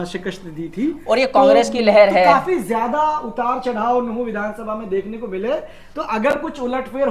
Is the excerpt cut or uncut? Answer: uncut